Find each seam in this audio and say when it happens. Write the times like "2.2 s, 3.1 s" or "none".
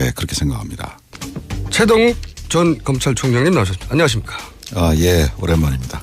1.0 s